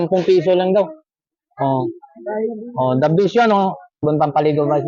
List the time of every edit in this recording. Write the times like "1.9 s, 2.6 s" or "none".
3.9 s